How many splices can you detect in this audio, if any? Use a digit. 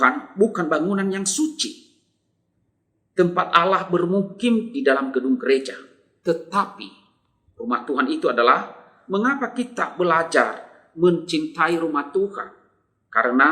1